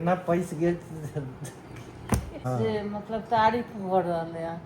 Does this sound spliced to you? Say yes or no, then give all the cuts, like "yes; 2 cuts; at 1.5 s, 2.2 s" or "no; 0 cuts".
yes; 1 cut; at 2.4 s